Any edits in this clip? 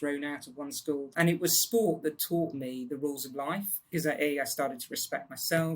yes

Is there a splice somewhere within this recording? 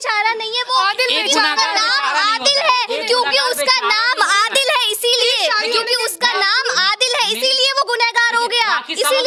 no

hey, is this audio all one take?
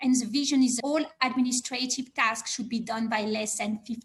yes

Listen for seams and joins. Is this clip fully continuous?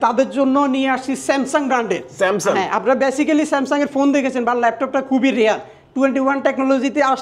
yes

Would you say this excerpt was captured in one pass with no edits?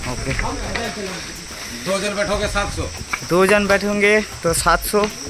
yes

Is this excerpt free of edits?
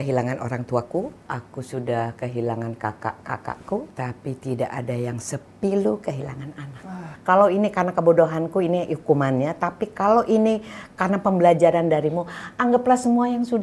no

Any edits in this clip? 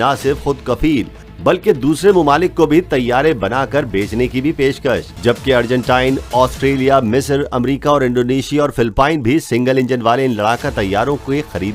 yes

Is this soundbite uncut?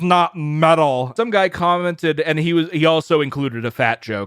no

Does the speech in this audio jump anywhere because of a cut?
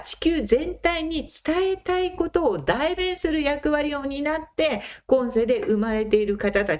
no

